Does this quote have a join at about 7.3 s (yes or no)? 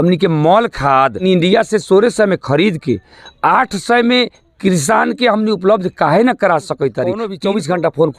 yes